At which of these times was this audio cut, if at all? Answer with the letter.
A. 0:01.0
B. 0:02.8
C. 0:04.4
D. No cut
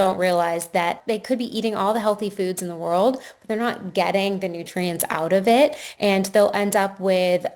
A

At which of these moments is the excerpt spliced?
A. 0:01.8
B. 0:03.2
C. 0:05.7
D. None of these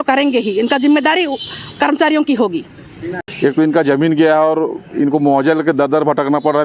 B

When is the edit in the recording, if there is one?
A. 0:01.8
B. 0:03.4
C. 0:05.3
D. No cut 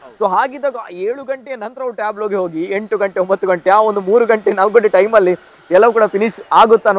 D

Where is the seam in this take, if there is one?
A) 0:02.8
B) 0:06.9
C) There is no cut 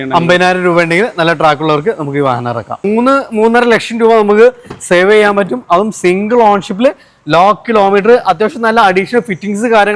A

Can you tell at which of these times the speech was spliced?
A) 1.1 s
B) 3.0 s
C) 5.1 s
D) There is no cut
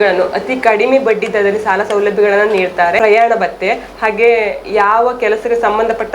B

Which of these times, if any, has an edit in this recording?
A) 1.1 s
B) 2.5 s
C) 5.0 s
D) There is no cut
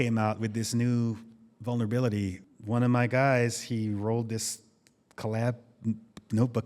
B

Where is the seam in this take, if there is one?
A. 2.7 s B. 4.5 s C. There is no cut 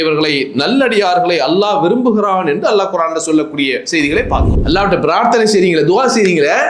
B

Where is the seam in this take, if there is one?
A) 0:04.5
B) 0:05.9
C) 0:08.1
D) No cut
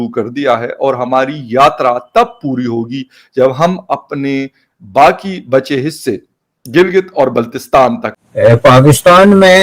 C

